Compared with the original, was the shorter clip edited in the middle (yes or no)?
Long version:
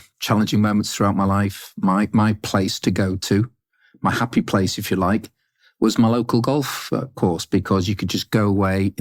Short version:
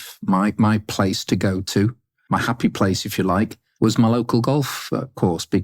yes